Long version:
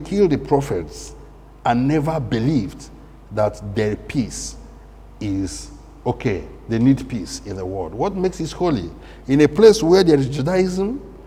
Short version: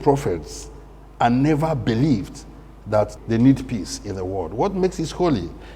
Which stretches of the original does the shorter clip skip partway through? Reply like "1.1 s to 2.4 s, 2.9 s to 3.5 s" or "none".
3.6 s to 6.6 s